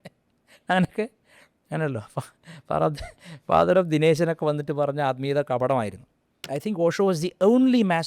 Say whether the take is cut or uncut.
cut